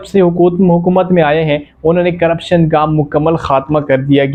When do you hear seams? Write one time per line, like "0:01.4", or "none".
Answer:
none